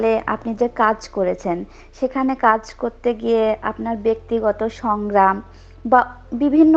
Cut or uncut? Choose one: uncut